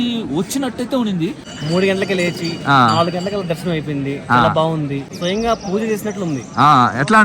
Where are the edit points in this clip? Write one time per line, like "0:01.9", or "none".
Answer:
0:01.5
0:05.1